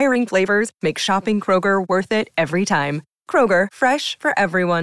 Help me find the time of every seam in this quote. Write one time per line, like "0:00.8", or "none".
none